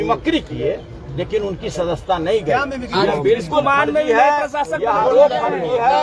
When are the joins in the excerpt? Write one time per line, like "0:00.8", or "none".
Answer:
none